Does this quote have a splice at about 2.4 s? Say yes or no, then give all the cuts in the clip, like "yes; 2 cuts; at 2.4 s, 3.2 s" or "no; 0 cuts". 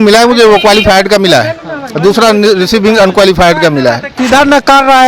no; 1 cut; at 4.1 s